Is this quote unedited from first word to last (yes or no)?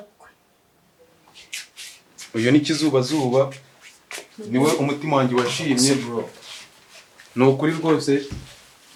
yes